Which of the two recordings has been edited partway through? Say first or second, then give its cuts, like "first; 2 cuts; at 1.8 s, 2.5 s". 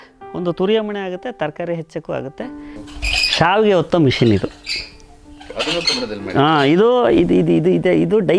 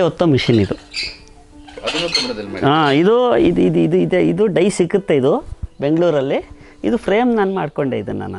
first; 1 cut; at 2.7 s